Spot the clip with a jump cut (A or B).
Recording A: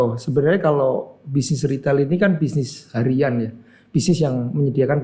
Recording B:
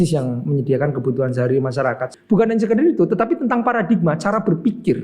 B